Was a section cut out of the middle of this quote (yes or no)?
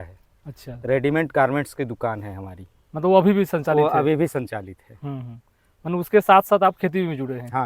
no